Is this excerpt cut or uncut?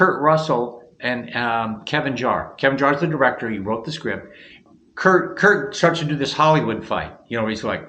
cut